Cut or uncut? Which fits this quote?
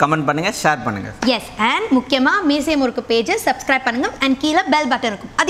uncut